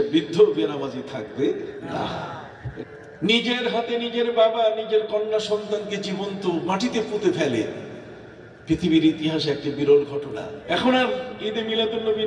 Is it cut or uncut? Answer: cut